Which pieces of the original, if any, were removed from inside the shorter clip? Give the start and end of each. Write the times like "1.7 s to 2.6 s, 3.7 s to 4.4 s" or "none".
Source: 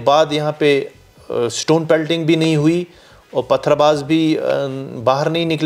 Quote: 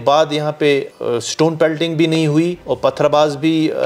0.9 s to 1.2 s, 2.9 s to 3.3 s